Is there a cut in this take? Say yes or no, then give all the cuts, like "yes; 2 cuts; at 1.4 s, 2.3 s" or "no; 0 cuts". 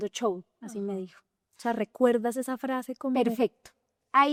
no; 0 cuts